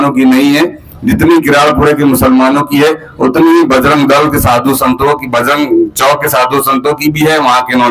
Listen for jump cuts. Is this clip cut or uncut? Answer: uncut